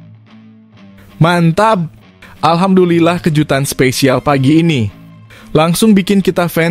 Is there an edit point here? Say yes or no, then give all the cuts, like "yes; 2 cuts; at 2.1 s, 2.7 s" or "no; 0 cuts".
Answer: yes; 1 cut; at 1.2 s